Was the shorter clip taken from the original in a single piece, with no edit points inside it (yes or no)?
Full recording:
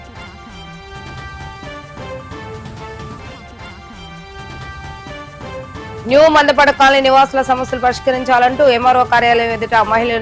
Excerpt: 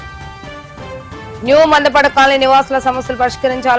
no